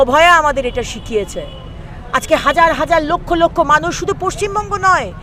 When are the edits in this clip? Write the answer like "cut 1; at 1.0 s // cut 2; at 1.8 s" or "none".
none

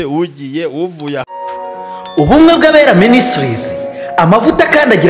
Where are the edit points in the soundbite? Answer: cut 1; at 1.3 s

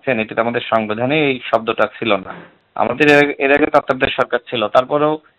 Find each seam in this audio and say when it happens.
none

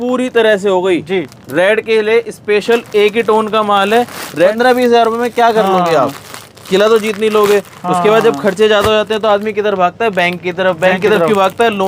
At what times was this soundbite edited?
cut 1; at 4.5 s

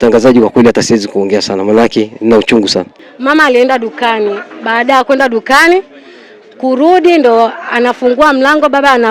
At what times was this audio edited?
cut 1; at 2.9 s

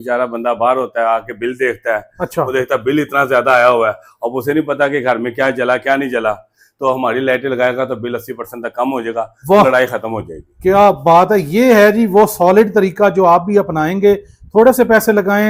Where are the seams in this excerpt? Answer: none

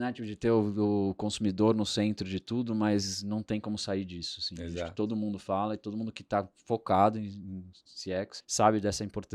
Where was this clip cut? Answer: cut 1; at 8.4 s

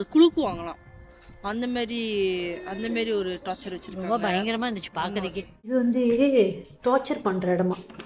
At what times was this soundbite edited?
cut 1; at 5.7 s

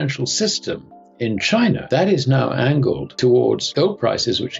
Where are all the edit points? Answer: cut 1; at 1.8 s // cut 2; at 3.1 s // cut 3; at 3.7 s

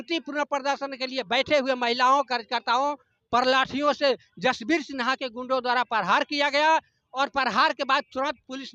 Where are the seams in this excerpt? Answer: none

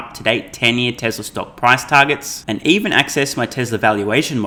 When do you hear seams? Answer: none

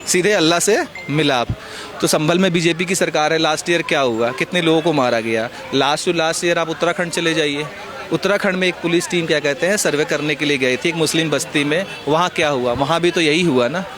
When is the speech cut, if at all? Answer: none

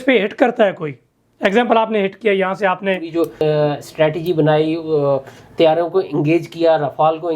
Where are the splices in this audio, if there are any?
cut 1; at 3.4 s

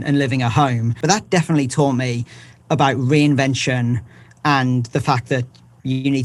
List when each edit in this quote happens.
cut 1; at 1.0 s

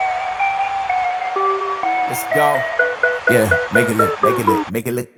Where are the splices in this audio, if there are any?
none

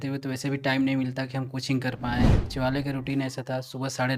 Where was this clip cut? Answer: cut 1; at 2.4 s

